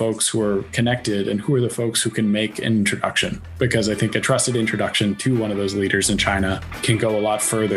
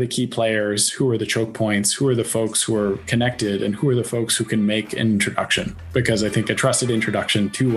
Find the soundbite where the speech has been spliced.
first; 1 cut; at 6.7 s

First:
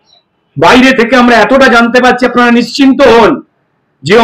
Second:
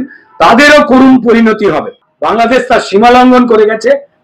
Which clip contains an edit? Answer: second; 1 cut; at 2.1 s

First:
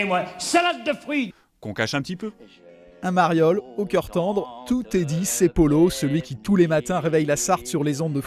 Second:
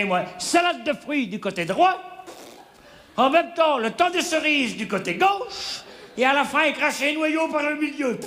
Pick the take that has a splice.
second; 1 cut; at 1.3 s

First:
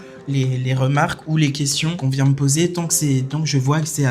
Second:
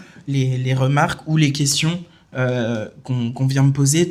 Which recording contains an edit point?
first; 1 cut; at 2.0 s

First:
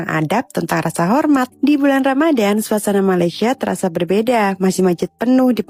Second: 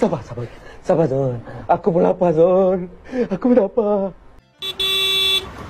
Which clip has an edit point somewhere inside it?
second; 1 cut; at 4.5 s

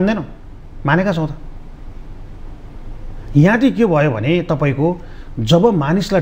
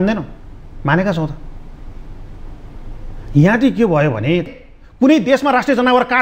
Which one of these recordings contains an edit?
second; 1 cut; at 4.5 s

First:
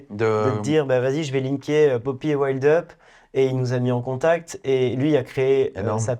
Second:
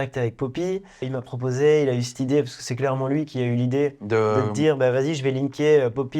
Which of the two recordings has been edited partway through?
second; 1 cut; at 1.1 s

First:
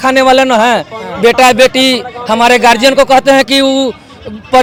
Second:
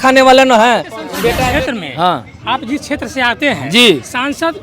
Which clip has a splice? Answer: second; 1 cut; at 1.4 s

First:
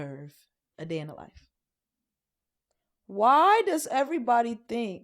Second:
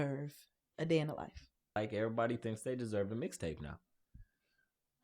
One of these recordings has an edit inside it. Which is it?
second; 1 cut; at 1.8 s

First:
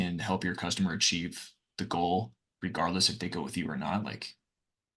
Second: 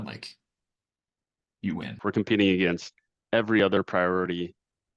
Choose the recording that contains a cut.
second; 1 cut; at 1.9 s

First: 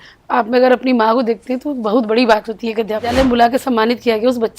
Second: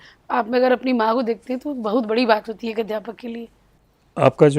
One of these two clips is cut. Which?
first; 1 cut; at 3.1 s

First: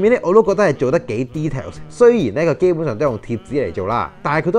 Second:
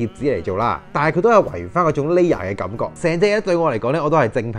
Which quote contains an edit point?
second; 1 cut; at 2.9 s

